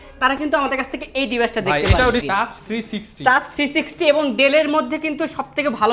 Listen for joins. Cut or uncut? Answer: cut